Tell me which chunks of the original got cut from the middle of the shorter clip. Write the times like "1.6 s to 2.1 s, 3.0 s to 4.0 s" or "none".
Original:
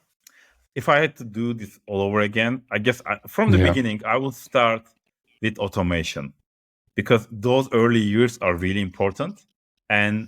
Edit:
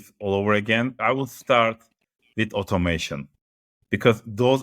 2.6 s to 4.0 s